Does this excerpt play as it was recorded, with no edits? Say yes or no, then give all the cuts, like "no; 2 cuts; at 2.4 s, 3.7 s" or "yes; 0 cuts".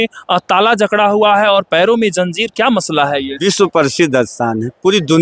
no; 1 cut; at 3.4 s